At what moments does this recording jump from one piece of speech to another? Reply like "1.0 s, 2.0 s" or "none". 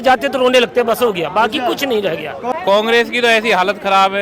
2.5 s